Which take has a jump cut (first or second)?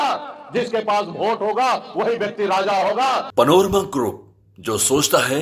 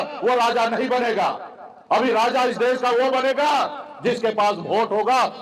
first